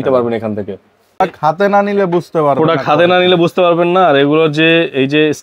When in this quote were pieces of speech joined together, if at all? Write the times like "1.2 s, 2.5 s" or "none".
1.2 s